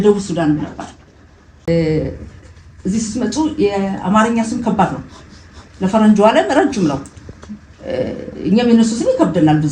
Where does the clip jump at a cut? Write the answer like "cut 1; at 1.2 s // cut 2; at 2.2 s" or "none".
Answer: cut 1; at 1.7 s